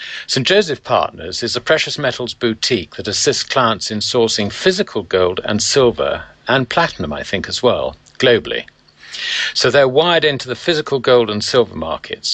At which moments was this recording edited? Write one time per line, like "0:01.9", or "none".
none

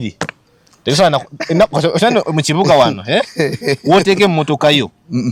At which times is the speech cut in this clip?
none

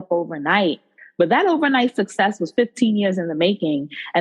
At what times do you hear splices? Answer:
0:01.0

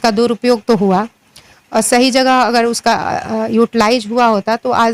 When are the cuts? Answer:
none

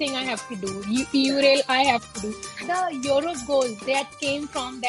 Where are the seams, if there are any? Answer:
0:02.6

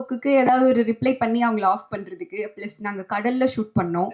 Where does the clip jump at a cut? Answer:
none

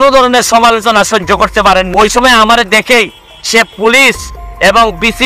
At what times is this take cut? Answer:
0:01.9

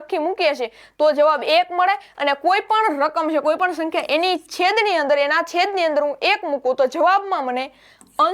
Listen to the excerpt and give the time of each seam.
none

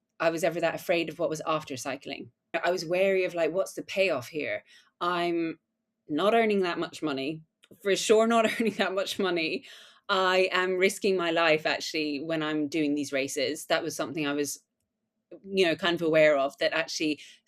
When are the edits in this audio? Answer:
0:02.5

